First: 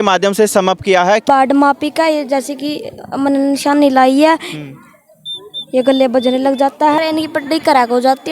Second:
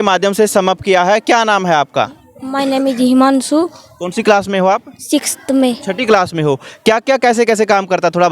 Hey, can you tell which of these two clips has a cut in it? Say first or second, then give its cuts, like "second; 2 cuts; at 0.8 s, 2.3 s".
first; 2 cuts; at 1.2 s, 7.0 s